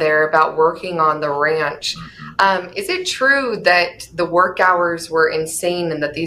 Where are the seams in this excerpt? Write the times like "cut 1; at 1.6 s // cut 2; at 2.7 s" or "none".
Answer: none